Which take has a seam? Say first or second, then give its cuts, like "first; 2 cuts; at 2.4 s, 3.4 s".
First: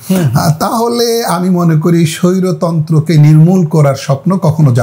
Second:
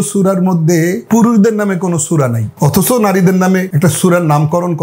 second; 3 cuts; at 1.0 s, 2.4 s, 3.7 s